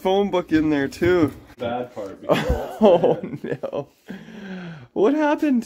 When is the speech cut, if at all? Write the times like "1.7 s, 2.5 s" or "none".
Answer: 1.6 s